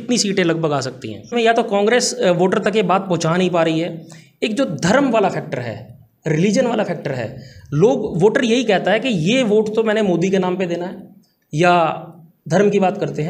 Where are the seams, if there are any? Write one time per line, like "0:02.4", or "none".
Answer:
0:01.3

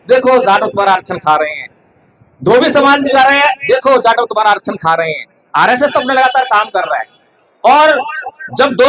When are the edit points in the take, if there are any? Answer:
none

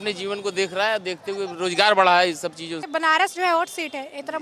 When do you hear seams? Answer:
0:02.8

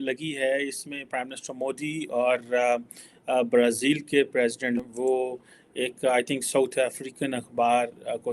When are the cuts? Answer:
0:04.8

